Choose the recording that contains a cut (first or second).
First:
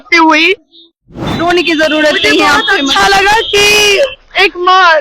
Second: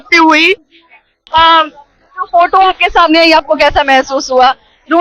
first